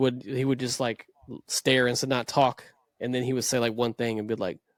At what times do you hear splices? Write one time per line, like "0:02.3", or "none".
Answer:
none